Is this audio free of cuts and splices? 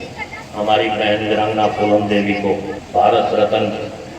no; 1 cut; at 2.8 s

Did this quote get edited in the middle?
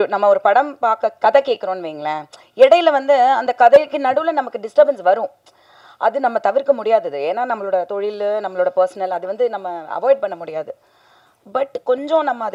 no; 0 cuts

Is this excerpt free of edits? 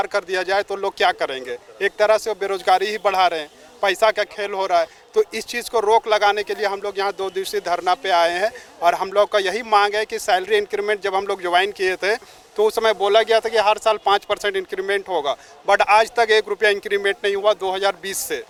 yes; 0 cuts

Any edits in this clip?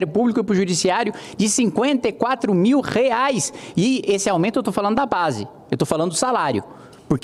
no; 0 cuts

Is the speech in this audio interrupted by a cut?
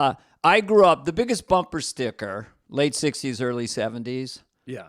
no; 0 cuts

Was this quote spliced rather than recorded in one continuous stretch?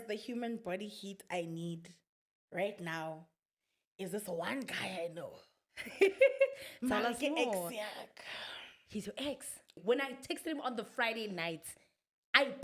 yes; 1 cut; at 9.8 s

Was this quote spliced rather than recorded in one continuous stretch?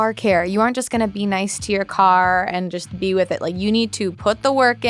no; 0 cuts

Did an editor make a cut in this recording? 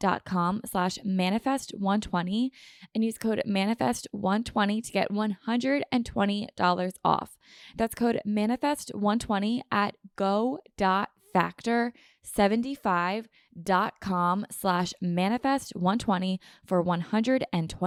no; 0 cuts

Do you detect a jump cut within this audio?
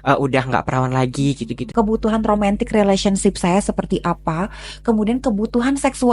yes; 1 cut; at 1.6 s

